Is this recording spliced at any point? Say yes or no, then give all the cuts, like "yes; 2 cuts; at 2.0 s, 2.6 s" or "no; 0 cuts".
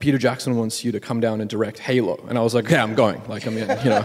no; 0 cuts